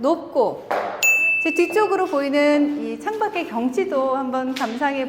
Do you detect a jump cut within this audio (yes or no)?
yes